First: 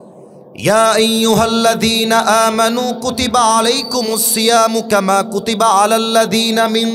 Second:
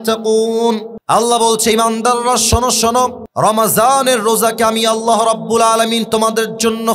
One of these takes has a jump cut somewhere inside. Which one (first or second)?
second